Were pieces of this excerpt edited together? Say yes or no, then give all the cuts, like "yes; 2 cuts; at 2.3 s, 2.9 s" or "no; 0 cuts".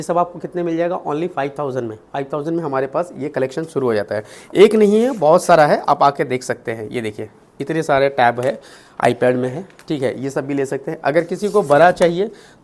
no; 0 cuts